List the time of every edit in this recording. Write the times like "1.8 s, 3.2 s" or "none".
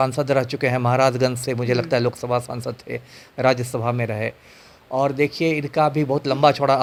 none